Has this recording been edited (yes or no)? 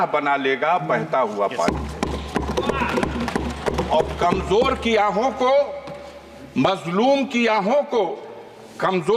no